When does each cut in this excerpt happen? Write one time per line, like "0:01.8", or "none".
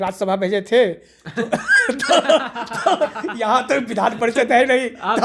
none

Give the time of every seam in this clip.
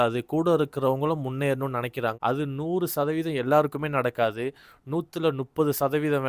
0:02.2

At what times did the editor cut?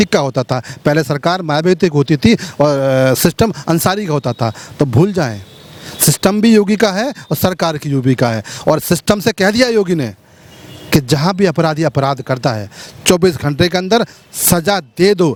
none

